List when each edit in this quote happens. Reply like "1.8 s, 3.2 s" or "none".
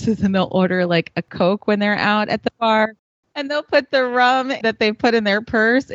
1.3 s, 3.0 s, 4.6 s